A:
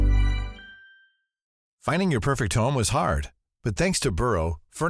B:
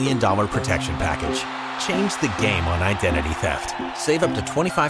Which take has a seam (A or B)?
A